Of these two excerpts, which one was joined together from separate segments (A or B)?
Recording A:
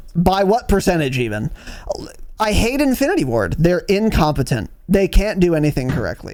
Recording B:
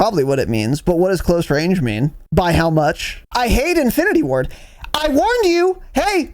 B